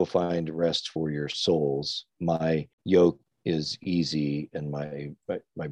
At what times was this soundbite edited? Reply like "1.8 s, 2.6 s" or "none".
2.7 s, 3.3 s